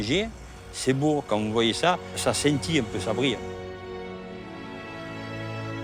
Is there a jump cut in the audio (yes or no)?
no